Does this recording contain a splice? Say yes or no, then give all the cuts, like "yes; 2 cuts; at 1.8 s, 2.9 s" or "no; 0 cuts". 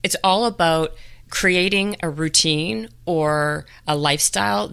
no; 0 cuts